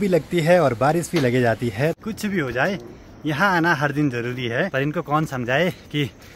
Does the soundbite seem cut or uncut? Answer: cut